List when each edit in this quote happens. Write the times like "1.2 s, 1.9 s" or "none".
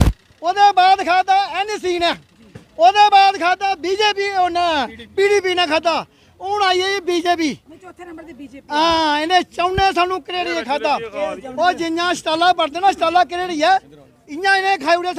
none